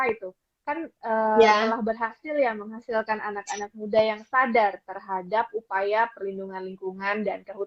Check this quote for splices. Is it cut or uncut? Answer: uncut